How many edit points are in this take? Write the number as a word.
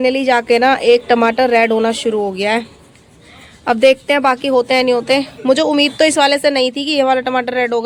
zero